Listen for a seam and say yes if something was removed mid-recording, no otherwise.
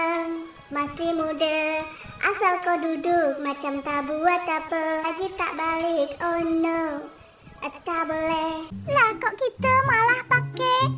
yes